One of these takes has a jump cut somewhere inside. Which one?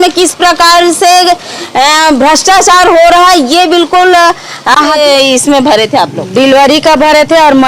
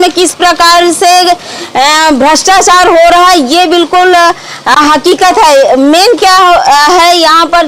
first; 1 cut; at 5.0 s

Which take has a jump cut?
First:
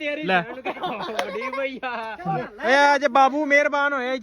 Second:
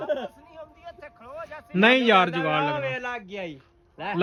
first; 1 cut; at 2.4 s

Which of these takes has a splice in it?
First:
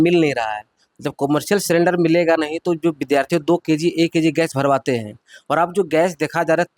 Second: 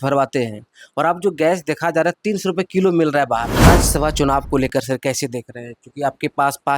second; 1 cut; at 3.7 s

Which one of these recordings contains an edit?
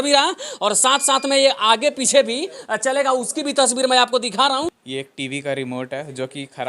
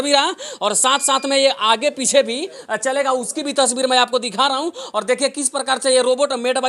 first; 1 cut; at 4.8 s

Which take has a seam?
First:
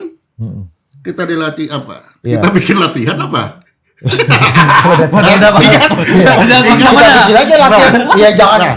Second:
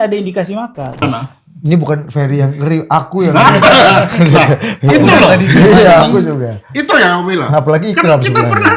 second; 1 cut; at 1.0 s

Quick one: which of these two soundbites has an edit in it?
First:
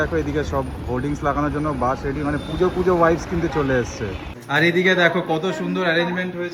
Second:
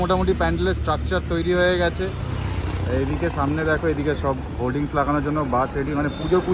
first; 1 cut; at 4.2 s

